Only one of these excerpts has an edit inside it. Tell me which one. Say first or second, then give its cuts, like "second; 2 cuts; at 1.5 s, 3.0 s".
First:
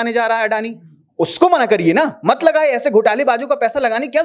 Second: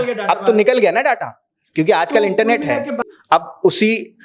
second; 1 cut; at 3.1 s